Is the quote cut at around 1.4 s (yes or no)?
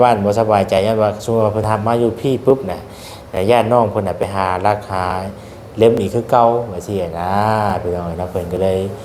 no